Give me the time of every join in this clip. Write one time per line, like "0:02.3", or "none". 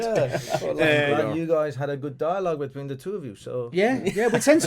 0:01.1